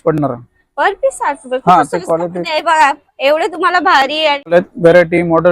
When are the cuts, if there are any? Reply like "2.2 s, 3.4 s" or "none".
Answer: 4.5 s

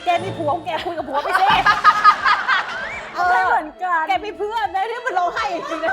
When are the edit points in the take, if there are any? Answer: 2.8 s

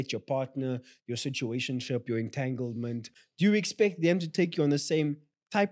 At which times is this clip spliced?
3.2 s

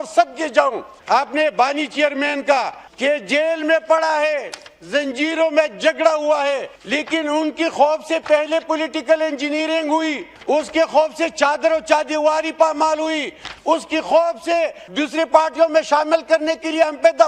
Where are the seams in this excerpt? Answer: 0.9 s, 2.8 s, 6.8 s, 10.3 s, 14.8 s

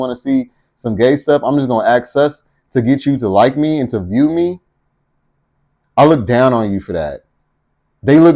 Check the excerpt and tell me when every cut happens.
none

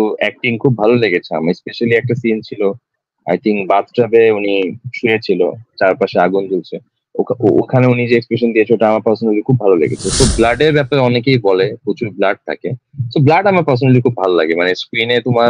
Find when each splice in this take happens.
10.2 s

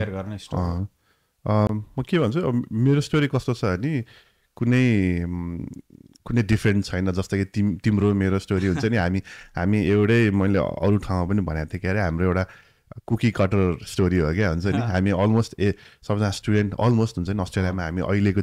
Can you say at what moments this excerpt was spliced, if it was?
none

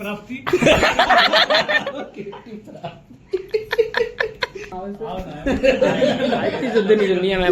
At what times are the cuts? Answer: 4.8 s

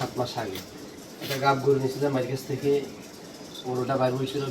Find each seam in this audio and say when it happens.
none

